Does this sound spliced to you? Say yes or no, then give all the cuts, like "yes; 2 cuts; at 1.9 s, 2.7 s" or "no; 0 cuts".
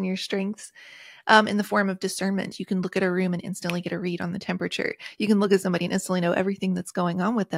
no; 0 cuts